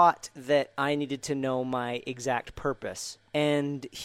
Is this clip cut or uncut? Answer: cut